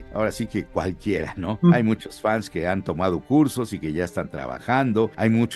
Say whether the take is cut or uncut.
uncut